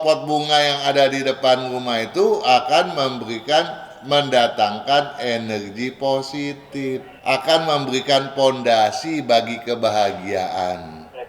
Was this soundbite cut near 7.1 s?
yes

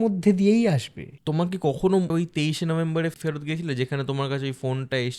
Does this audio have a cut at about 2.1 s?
yes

